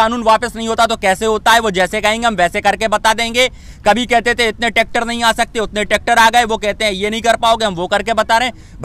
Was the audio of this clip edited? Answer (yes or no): no